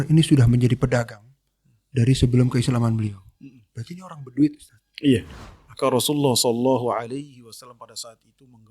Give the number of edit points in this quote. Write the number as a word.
one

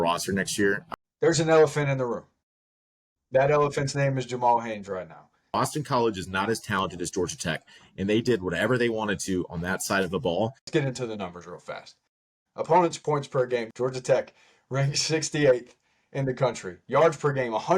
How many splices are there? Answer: four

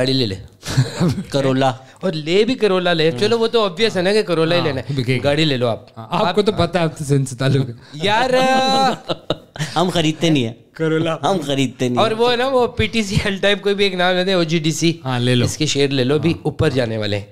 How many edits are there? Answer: zero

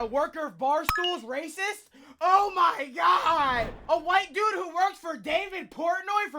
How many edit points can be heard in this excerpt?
one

